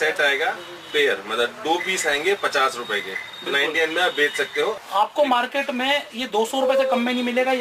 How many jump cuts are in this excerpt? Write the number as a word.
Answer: one